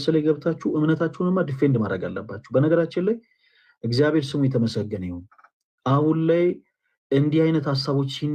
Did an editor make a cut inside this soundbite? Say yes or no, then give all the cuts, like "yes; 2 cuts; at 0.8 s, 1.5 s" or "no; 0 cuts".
no; 0 cuts